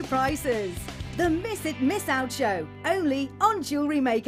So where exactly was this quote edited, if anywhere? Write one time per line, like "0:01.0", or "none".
none